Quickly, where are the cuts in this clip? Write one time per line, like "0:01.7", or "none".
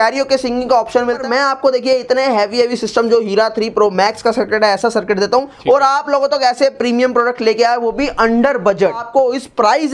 0:01.2
0:05.5
0:09.0